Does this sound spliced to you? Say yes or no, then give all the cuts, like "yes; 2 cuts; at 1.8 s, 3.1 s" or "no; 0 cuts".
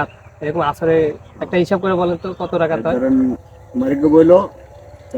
yes; 1 cut; at 3.5 s